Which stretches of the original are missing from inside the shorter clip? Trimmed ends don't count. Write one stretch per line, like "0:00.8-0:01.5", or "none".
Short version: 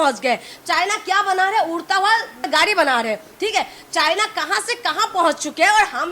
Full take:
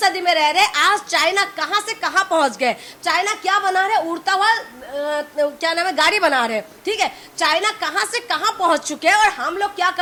0:04.8-0:05.9